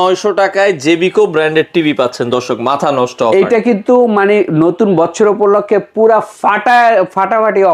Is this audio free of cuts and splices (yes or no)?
yes